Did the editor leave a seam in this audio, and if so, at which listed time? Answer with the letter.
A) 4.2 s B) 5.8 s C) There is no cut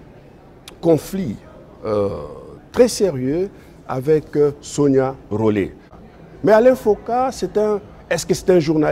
B